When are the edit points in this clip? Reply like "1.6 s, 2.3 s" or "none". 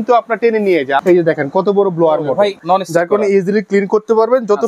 1.0 s, 2.6 s